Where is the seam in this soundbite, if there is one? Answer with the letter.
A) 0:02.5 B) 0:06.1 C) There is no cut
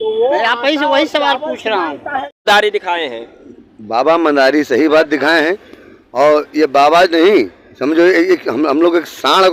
A